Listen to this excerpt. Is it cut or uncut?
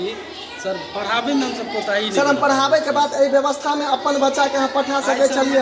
uncut